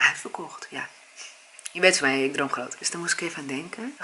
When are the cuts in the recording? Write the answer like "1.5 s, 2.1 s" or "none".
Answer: none